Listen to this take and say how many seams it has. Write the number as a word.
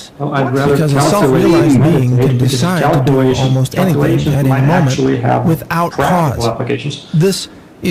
zero